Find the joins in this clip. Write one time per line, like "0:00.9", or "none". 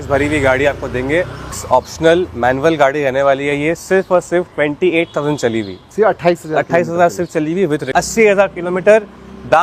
0:01.5
0:07.9